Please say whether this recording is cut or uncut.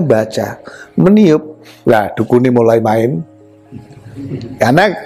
uncut